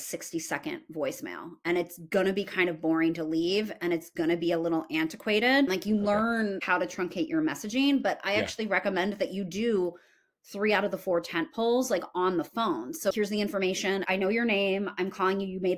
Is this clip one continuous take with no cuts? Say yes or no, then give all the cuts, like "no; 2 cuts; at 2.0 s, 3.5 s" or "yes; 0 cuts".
no; 2 cuts; at 5.7 s, 13.1 s